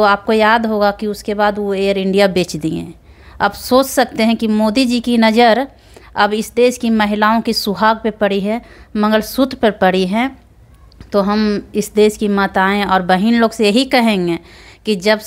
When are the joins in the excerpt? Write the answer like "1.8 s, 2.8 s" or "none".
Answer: none